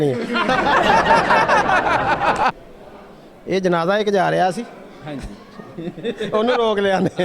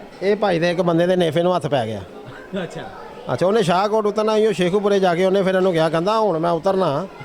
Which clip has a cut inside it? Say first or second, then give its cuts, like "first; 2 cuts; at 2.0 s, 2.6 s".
first; 1 cut; at 2.6 s